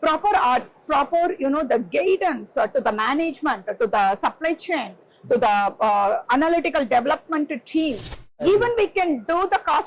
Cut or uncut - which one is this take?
cut